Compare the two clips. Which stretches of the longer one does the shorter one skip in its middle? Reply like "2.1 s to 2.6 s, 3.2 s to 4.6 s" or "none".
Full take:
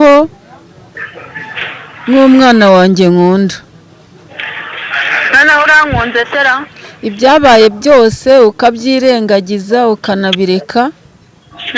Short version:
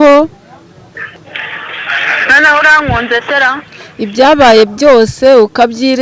1.1 s to 4.1 s